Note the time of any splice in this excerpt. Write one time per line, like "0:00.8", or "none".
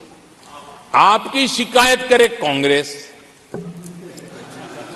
none

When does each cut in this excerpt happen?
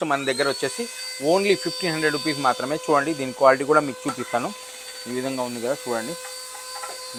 none

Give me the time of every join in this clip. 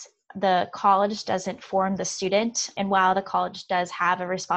0:02.7

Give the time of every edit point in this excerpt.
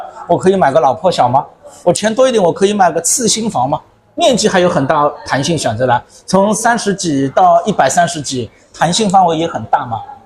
none

